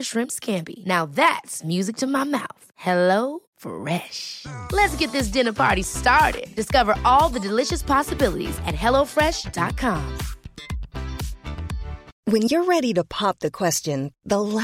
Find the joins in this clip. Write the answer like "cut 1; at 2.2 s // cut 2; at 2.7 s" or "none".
cut 1; at 12.1 s